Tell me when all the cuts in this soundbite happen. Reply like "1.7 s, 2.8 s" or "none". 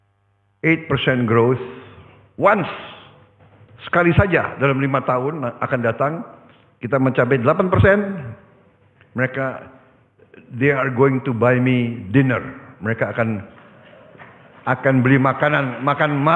none